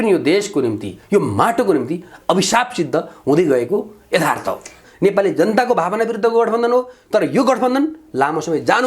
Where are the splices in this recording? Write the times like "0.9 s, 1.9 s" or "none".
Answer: 4.8 s